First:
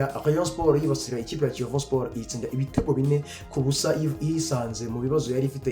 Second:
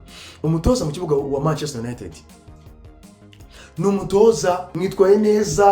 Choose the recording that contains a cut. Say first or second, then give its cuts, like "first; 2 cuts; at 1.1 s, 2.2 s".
second; 1 cut; at 4.7 s